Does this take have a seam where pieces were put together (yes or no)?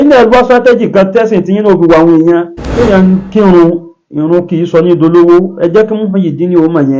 yes